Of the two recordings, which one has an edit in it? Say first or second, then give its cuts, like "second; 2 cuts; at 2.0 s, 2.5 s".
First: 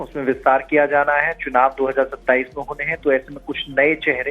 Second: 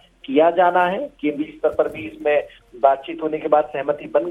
first; 1 cut; at 1.7 s